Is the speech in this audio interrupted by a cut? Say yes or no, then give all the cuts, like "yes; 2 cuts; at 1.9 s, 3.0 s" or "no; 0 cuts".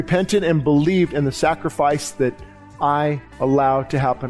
yes; 1 cut; at 3.3 s